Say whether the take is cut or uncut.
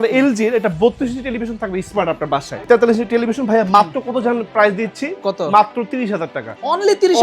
cut